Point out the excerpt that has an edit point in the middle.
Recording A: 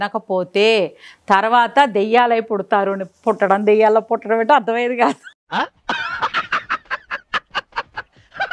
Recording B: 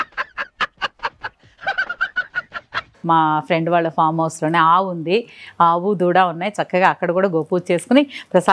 B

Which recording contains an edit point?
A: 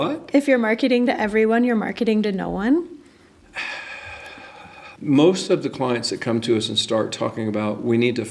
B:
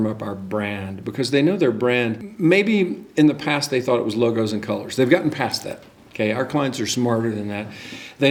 A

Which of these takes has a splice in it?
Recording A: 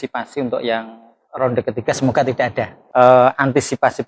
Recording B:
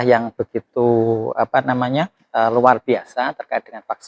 A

